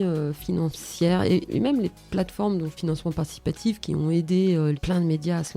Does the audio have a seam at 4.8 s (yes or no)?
yes